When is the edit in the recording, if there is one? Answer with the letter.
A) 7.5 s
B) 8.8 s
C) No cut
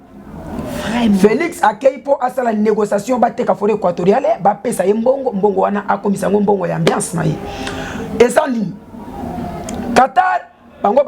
C